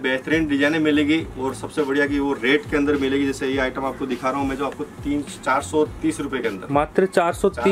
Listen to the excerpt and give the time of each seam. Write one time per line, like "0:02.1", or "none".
none